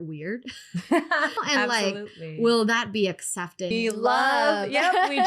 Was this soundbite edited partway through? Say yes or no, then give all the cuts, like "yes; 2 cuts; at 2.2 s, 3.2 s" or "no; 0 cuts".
yes; 2 cuts; at 1.4 s, 3.7 s